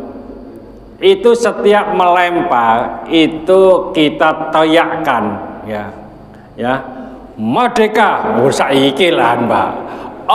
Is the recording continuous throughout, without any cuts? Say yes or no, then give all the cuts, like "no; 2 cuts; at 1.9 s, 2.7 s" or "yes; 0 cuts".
yes; 0 cuts